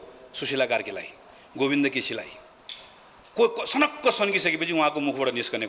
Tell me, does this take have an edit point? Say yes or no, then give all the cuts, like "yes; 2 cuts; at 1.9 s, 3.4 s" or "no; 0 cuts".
no; 0 cuts